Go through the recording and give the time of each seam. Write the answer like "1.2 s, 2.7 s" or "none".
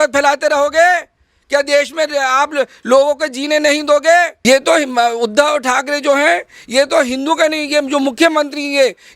4.4 s